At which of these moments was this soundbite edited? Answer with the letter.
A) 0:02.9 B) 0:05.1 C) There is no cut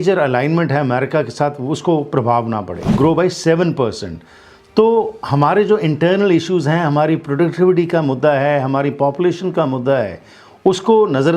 A